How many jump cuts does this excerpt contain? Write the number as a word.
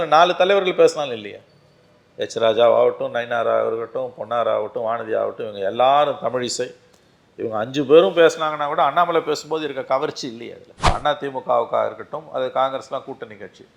one